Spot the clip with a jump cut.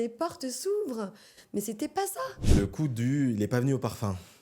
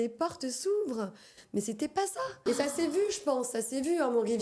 first; 1 cut; at 2.4 s

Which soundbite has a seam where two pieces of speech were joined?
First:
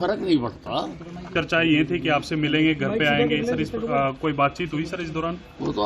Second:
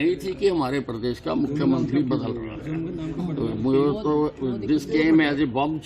first; 1 cut; at 1.3 s

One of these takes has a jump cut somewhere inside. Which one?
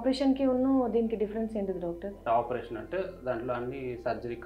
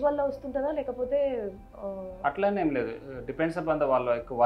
first; 1 cut; at 2.2 s

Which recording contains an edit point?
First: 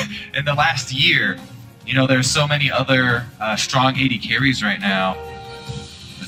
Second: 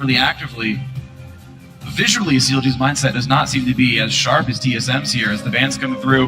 second; 1 cut; at 2.4 s

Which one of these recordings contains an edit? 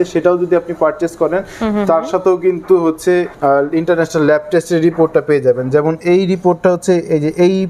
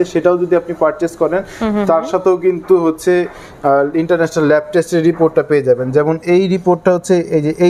first; 1 cut; at 3.3 s

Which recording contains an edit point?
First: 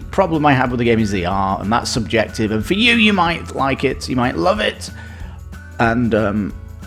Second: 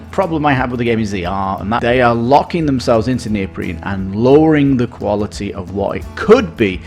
second; 1 cut; at 1.8 s

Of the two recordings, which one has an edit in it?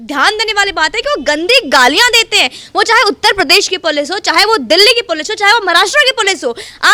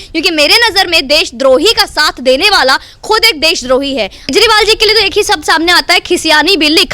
second; 1 cut; at 4.3 s

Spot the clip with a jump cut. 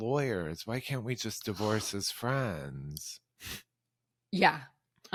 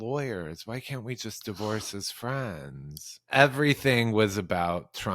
second; 1 cut; at 3.3 s

